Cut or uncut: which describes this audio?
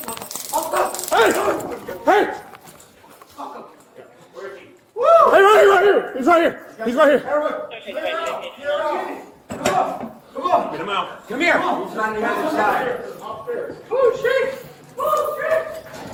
uncut